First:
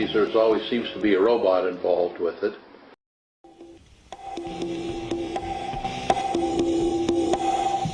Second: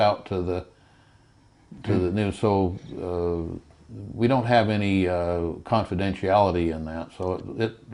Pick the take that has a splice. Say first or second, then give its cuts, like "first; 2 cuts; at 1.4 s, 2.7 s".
first; 1 cut; at 2.9 s